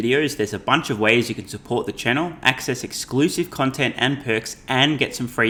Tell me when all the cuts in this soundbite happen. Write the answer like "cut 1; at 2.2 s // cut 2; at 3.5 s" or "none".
none